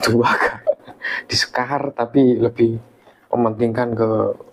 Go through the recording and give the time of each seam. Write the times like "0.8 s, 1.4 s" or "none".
none